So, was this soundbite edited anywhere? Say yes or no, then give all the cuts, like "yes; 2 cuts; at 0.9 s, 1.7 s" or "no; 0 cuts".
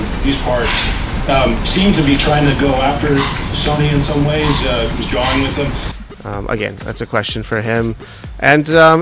yes; 1 cut; at 5.9 s